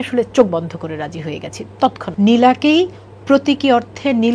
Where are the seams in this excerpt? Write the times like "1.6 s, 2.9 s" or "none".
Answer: 2.1 s